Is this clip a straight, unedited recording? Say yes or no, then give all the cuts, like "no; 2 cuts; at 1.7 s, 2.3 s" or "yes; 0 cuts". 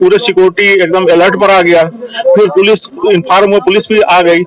yes; 0 cuts